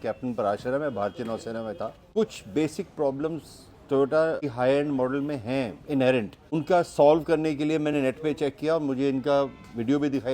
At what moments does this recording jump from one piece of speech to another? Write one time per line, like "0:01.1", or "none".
0:01.9
0:04.5
0:06.4